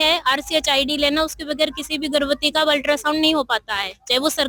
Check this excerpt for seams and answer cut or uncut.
uncut